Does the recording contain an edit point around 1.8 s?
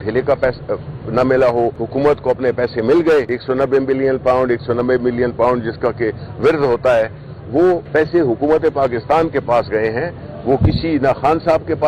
yes; 3 cuts; at 1.8 s, 3.3 s, 7.8 s

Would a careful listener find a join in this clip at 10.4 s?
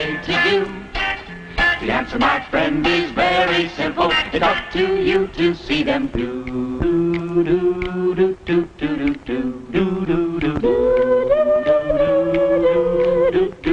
yes; 1 cut; at 10.4 s

